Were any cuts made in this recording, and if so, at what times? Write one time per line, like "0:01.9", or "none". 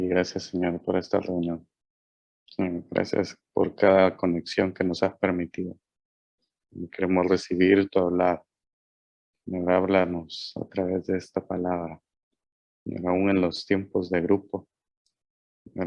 none